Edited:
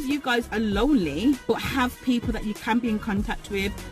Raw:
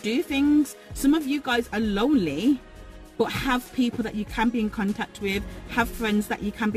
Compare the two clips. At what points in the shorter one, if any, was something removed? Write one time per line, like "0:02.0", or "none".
0:01.4